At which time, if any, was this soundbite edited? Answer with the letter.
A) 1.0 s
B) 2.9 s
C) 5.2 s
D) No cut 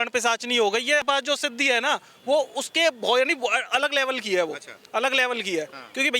A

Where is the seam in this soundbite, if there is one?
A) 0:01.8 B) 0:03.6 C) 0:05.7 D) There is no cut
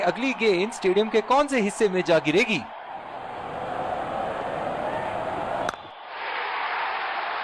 C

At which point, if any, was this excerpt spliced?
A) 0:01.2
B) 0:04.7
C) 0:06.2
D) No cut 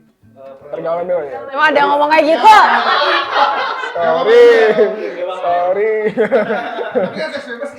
D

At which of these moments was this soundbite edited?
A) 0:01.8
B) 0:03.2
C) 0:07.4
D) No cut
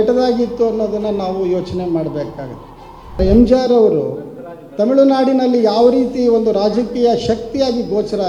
B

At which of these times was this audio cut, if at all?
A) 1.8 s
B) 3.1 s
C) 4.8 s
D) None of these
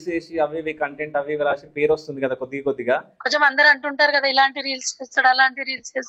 B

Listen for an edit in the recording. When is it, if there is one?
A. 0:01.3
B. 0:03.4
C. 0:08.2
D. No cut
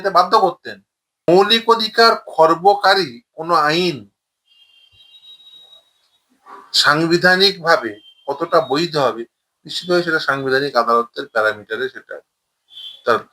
A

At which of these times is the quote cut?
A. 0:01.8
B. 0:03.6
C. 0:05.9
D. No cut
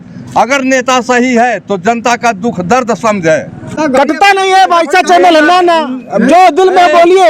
B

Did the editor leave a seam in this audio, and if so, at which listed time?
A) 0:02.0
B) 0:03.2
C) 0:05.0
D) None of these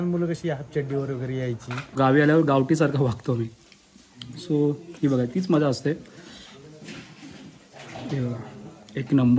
A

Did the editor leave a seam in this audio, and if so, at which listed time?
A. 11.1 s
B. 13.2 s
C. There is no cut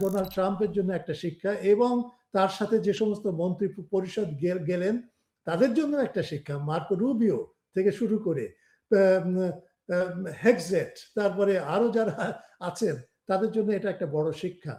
C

